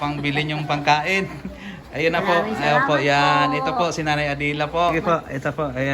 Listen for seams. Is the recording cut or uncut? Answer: cut